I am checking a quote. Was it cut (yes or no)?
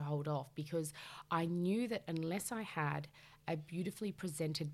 no